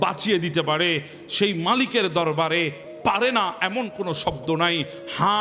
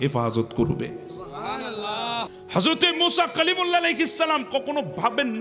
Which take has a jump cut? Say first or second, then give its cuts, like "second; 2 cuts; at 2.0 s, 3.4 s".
second; 1 cut; at 2.4 s